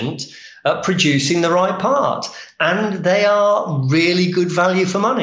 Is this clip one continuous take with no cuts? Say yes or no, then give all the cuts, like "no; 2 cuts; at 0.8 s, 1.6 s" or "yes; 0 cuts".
yes; 0 cuts